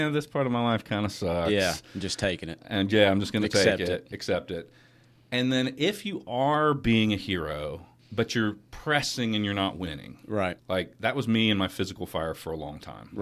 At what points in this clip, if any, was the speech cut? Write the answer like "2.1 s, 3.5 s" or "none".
7.9 s, 10.6 s